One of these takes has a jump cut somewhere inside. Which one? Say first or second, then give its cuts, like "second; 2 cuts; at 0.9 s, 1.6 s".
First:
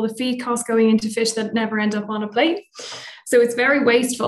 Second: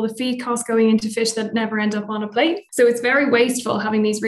second; 1 cut; at 2.6 s